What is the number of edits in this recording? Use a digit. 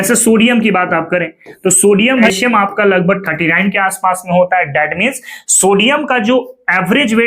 1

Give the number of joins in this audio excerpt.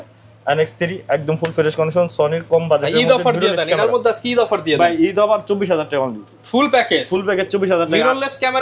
0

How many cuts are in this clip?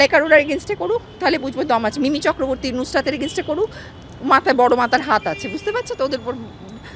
0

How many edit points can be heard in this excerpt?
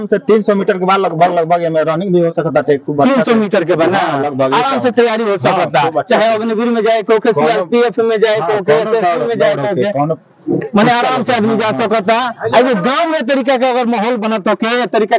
0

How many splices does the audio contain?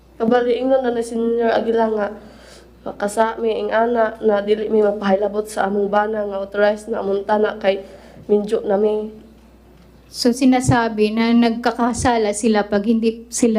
0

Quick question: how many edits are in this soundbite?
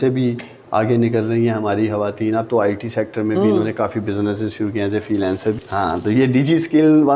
0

